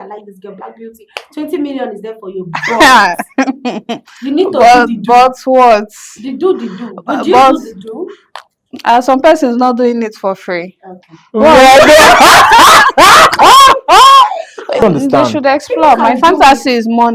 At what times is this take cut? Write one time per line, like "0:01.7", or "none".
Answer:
0:14.8